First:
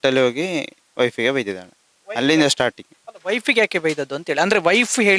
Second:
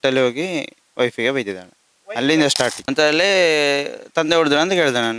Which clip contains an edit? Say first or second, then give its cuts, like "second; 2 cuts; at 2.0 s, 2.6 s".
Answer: second; 1 cut; at 2.8 s